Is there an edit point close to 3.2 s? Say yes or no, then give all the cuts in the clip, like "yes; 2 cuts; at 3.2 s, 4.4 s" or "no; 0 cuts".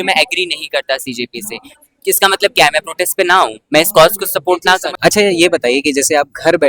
no; 1 cut; at 4.9 s